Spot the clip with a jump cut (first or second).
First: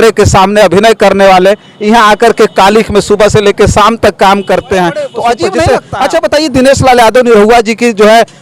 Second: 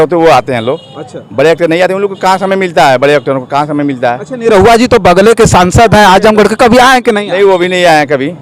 first